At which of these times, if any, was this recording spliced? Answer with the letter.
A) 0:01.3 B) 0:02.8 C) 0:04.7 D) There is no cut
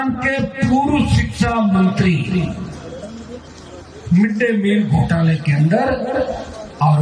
D